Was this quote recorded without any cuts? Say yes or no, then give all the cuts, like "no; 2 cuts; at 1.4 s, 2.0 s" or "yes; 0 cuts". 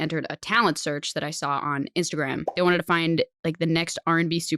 no; 1 cut; at 2.4 s